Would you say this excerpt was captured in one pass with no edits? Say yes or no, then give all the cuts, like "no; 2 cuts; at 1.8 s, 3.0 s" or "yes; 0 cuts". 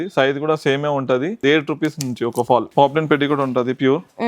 no; 2 cuts; at 1.4 s, 2.7 s